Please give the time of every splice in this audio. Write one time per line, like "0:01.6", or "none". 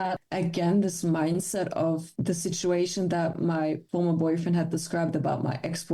0:02.1
0:03.8